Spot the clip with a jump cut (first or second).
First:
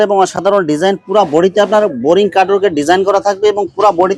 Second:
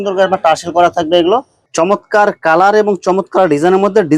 second